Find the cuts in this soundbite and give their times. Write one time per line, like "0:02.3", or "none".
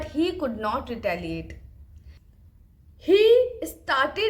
0:02.2